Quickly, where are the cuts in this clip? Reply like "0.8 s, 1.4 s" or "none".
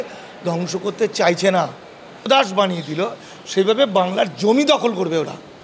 2.3 s